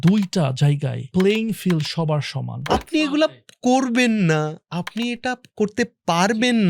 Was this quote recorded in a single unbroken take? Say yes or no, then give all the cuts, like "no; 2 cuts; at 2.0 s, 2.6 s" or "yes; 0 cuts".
no; 2 cuts; at 0.9 s, 2.7 s